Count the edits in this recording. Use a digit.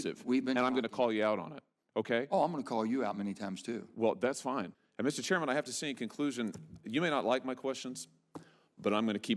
1